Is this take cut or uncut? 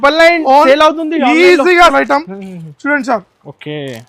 cut